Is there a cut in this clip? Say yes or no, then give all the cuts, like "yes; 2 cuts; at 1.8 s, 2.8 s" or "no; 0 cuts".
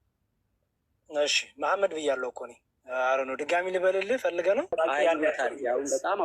yes; 1 cut; at 4.7 s